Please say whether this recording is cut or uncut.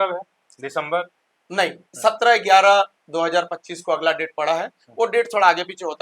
uncut